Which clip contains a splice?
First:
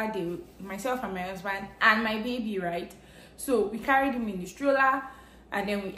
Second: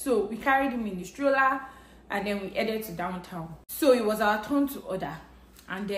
second; 1 cut; at 3.6 s

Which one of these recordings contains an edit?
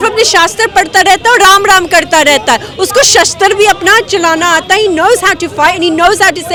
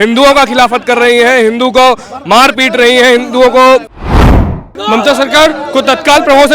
second; 1 cut; at 4.3 s

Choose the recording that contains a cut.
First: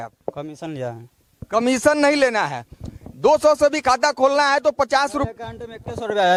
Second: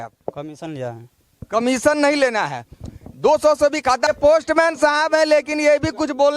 second; 1 cut; at 4.1 s

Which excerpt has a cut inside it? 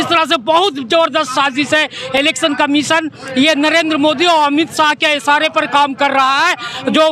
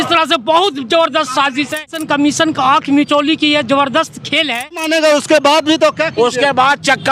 second; 2 cuts; at 2.0 s, 4.8 s

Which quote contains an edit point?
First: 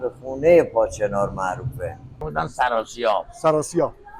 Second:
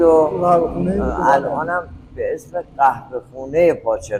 first; 1 cut; at 2.1 s

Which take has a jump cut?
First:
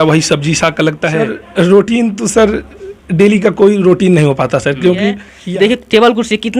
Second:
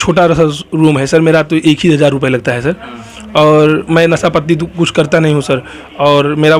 first; 2 cuts; at 1.4 s, 5.3 s

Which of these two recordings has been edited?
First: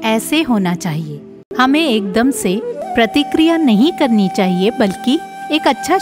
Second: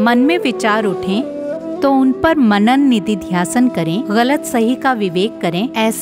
first; 2 cuts; at 1.4 s, 2.8 s

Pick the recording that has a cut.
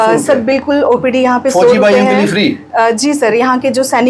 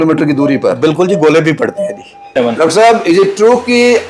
second; 1 cut; at 2.4 s

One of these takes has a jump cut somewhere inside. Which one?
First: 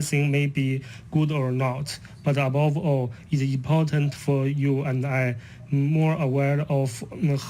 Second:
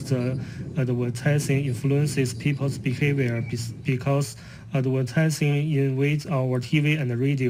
first; 1 cut; at 6.2 s

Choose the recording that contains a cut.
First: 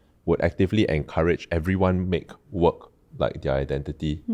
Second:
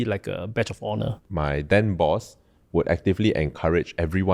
second; 1 cut; at 1.2 s

